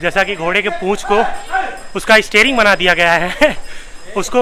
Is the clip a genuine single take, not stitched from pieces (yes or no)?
yes